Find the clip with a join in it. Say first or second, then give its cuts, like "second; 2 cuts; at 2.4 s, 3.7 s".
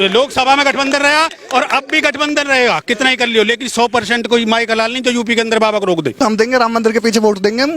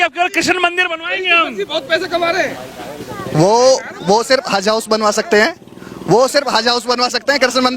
first; 1 cut; at 6.2 s